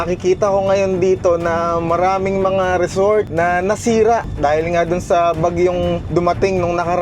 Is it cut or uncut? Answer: cut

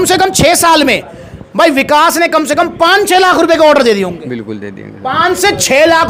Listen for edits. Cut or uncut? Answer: uncut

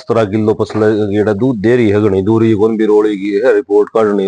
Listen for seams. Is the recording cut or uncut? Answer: uncut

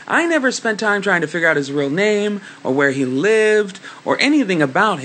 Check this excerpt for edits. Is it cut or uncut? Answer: cut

